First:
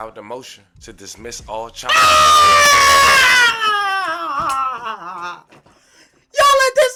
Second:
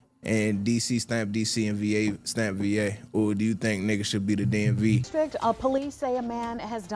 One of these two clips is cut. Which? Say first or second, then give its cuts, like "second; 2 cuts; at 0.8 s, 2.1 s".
second; 1 cut; at 5.1 s